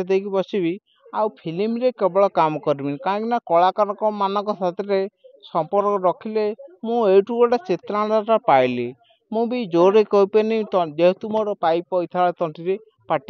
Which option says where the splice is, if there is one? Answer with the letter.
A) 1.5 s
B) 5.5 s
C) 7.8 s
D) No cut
D